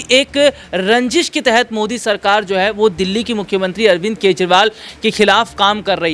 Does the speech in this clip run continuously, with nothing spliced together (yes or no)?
yes